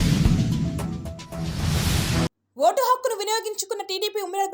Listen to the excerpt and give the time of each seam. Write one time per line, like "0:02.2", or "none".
0:02.4